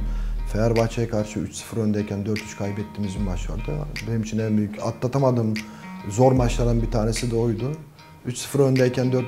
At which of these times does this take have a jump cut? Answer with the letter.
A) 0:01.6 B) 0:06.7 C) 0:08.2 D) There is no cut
D